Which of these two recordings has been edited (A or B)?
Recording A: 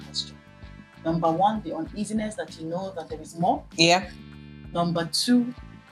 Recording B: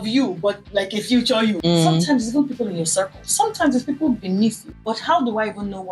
B